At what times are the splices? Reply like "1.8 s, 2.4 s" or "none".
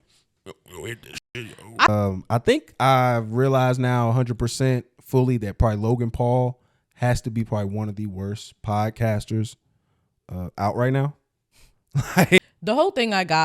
1.9 s, 12.4 s